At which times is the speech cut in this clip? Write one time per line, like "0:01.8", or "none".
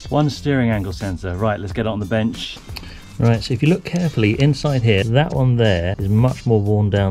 0:02.5
0:05.0
0:06.0

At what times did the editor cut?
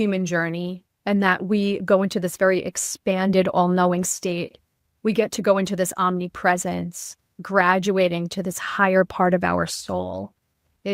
0:07.4

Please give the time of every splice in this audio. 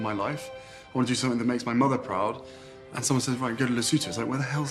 0:02.9

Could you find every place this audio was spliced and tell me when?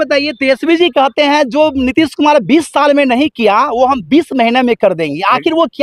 none

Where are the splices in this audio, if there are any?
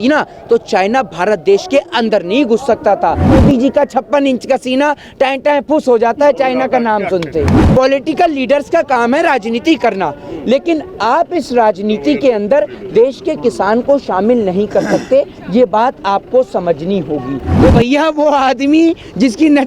0:03.3
0:07.6
0:17.4

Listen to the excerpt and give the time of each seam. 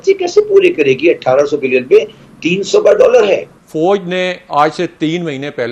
0:03.6

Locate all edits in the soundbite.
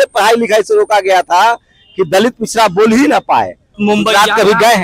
0:03.8

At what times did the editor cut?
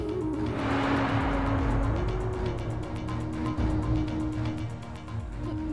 none

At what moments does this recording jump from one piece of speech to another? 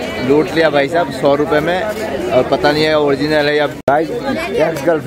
0:03.8

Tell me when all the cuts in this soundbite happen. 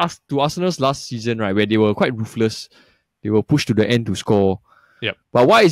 none

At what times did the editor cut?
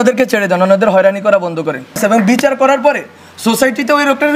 0:02.0

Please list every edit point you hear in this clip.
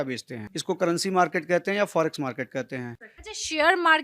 0:02.9

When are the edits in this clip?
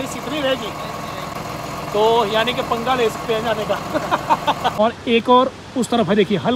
0:01.4
0:04.8

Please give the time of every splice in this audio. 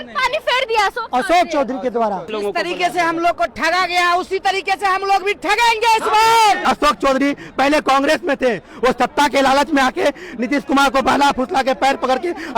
0:02.3
0:06.6

